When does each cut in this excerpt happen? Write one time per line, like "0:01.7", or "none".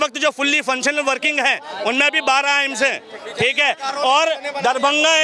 none